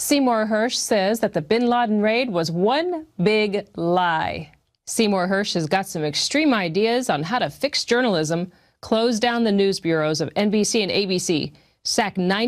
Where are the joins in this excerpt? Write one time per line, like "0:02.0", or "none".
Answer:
none